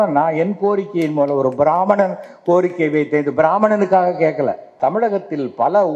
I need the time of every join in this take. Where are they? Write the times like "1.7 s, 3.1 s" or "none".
4.8 s